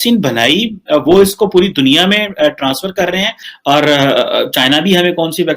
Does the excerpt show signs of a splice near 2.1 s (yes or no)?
no